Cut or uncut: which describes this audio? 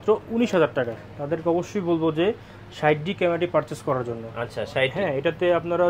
cut